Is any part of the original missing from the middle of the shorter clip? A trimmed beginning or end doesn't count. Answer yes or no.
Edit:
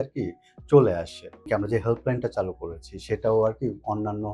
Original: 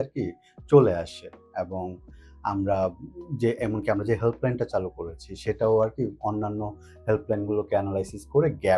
yes